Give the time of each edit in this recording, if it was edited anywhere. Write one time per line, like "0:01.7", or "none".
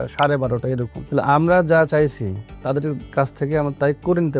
0:01.0
0:03.0